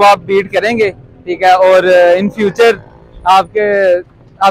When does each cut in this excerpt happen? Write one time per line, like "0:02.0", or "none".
none